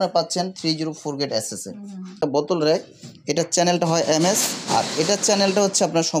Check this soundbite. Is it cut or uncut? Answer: cut